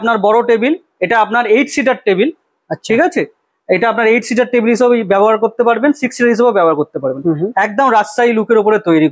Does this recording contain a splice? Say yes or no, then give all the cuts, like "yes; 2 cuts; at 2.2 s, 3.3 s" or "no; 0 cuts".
no; 0 cuts